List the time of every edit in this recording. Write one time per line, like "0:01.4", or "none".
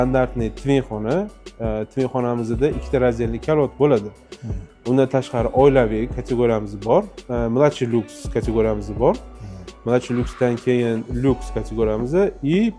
none